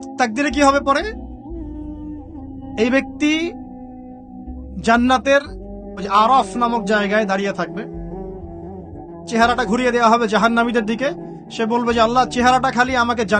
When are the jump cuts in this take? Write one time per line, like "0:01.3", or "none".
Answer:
none